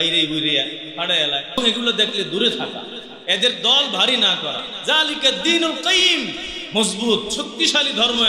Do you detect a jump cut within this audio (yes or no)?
yes